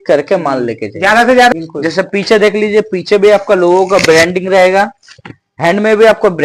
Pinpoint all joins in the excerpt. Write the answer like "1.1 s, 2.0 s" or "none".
1.5 s